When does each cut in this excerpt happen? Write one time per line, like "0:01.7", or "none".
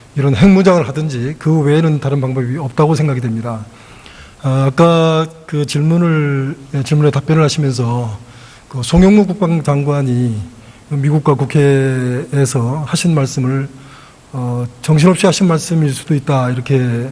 0:06.0